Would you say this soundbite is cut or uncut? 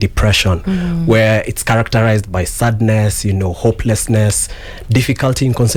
uncut